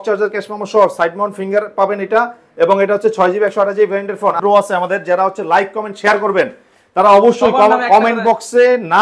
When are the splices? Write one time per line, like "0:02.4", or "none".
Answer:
0:04.4